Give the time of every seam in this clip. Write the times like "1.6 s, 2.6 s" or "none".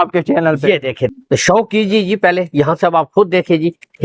1.1 s